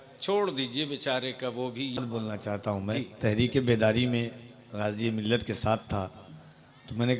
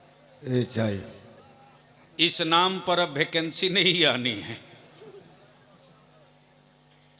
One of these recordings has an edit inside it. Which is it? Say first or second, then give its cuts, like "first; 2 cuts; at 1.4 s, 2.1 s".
first; 1 cut; at 2.0 s